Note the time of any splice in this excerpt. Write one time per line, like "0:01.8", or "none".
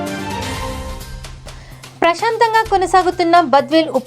0:01.2